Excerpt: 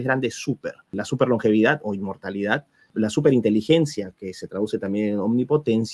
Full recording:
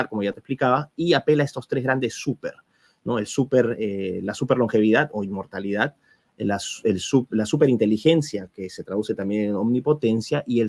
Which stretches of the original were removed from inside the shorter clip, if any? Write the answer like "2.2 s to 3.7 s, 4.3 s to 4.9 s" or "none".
2.7 s to 4.2 s, 6.2 s to 7.3 s